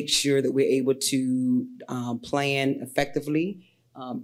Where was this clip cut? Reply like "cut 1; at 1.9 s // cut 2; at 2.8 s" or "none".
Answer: none